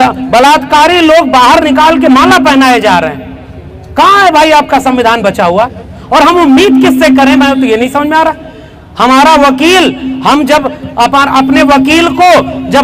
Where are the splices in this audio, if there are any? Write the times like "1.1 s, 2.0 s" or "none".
none